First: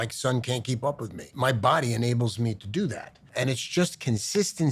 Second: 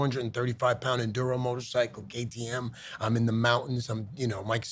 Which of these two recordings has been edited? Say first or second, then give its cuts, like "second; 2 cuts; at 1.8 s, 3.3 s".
first; 1 cut; at 1.3 s